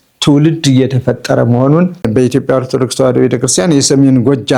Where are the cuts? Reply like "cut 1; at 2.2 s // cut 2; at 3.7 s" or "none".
cut 1; at 2.1 s